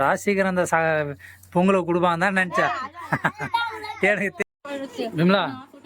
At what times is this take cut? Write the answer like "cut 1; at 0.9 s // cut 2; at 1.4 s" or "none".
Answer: cut 1; at 4.4 s